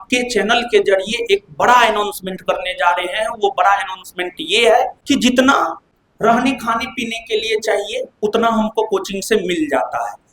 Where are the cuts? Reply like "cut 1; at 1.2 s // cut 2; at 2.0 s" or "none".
none

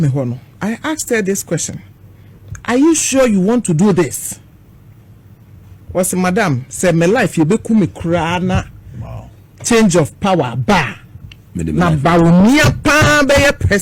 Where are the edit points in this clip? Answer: none

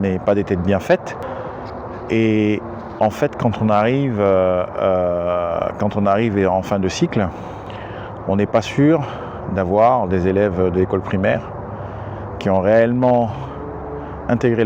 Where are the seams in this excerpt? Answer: none

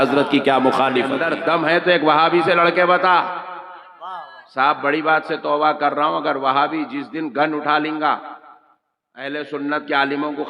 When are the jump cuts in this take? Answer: cut 1; at 1.2 s

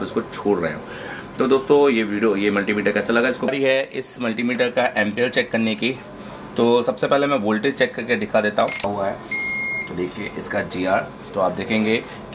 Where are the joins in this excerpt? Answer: cut 1; at 3.5 s // cut 2; at 8.9 s

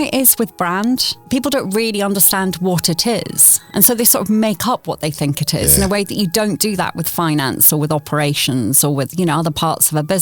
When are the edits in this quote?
cut 1; at 1.1 s

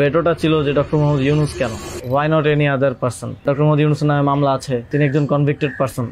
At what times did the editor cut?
cut 1; at 1.9 s // cut 2; at 3.4 s // cut 3; at 4.9 s

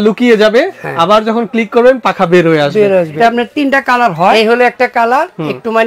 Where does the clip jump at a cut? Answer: cut 1; at 3.2 s // cut 2; at 4.4 s

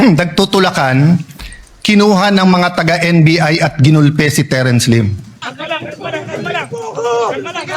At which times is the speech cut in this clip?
cut 1; at 5.4 s

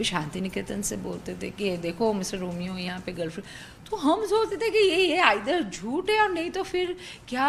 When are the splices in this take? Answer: cut 1; at 1.2 s

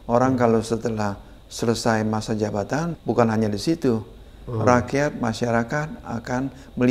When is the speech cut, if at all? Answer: cut 1; at 2.9 s

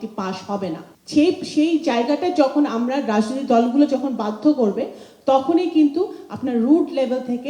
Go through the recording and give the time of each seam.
cut 1; at 0.9 s

